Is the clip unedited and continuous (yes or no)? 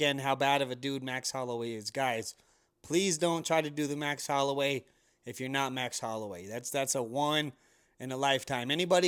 yes